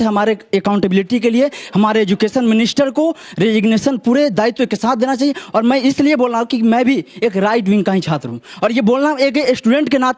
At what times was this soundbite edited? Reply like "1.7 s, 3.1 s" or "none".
none